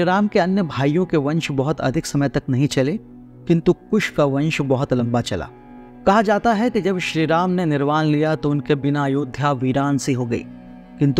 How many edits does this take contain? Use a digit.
0